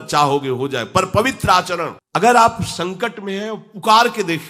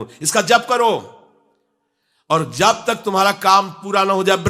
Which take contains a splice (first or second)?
first